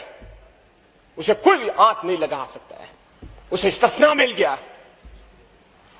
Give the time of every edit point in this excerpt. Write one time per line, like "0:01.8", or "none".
none